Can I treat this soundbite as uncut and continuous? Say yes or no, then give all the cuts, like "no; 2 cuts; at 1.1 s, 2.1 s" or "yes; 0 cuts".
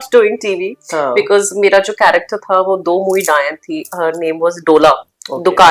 yes; 0 cuts